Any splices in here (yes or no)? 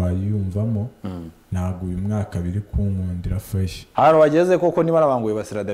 yes